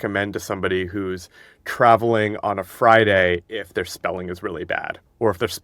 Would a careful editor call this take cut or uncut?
uncut